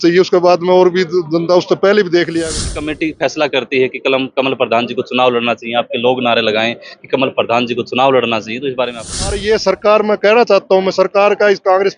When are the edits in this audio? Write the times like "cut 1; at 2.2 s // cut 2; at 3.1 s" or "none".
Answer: cut 1; at 2.5 s // cut 2; at 9.4 s